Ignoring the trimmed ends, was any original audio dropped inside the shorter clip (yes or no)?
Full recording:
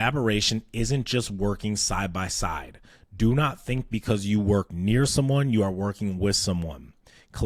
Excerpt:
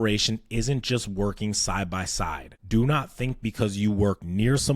yes